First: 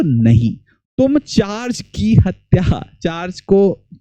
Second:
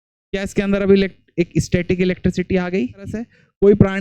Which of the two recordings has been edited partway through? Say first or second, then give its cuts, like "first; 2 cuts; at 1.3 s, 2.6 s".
second; 1 cut; at 3.0 s